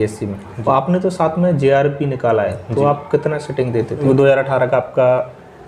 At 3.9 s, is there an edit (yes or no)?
yes